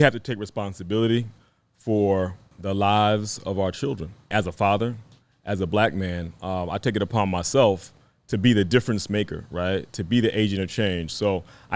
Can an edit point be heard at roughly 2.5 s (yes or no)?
yes